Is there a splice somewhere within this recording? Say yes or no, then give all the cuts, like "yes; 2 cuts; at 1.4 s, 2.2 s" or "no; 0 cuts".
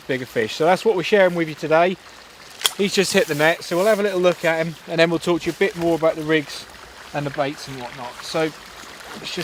no; 0 cuts